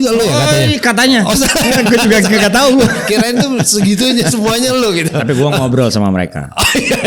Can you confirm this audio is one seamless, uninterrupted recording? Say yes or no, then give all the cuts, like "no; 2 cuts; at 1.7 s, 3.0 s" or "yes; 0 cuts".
yes; 0 cuts